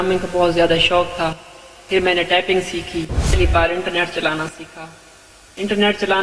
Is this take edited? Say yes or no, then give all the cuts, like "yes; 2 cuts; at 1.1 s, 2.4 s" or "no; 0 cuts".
yes; 1 cut; at 3.4 s